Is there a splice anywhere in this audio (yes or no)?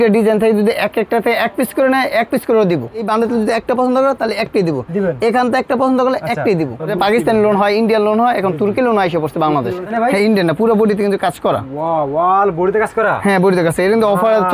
yes